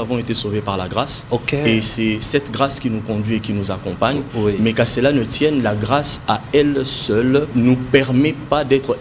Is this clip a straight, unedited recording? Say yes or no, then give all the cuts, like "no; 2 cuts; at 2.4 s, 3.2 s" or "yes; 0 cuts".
no; 1 cut; at 7.5 s